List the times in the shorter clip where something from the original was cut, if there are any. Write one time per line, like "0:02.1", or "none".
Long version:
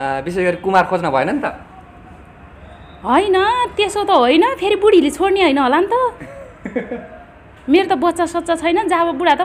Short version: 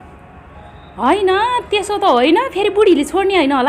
none